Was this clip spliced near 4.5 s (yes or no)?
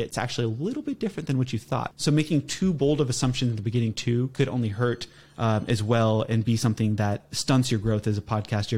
no